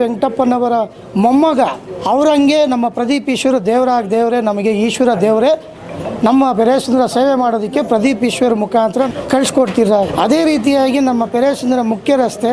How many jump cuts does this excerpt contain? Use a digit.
3